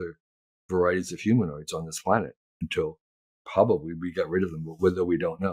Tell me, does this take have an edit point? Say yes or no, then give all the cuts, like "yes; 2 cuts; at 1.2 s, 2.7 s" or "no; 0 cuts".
no; 0 cuts